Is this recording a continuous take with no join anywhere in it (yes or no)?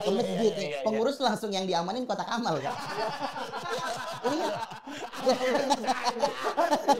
yes